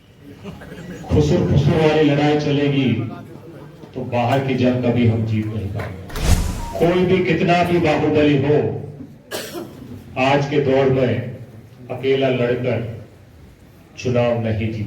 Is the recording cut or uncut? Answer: cut